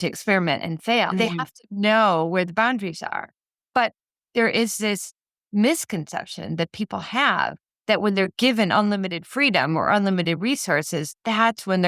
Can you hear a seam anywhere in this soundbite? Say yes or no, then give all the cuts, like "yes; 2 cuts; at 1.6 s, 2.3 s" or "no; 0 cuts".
yes; 1 cut; at 1.1 s